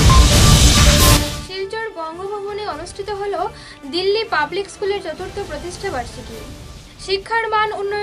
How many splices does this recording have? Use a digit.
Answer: 1